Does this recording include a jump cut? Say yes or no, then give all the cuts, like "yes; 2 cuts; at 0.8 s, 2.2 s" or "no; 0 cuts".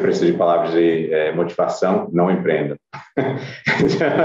no; 0 cuts